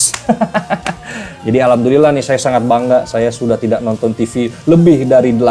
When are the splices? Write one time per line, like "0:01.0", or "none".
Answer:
none